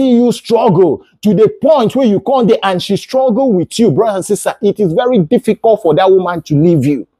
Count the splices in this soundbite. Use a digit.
0